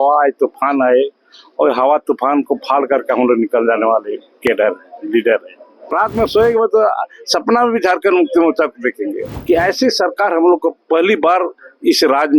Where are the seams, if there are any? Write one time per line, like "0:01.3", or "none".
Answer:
0:05.7
0:09.3